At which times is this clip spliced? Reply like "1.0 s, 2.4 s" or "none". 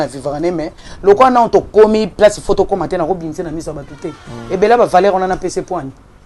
none